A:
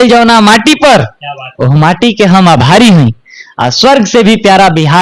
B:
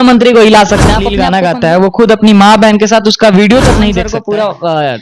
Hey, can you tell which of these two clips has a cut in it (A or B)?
B